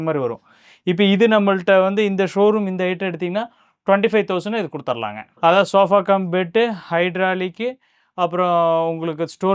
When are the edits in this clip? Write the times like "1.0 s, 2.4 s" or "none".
none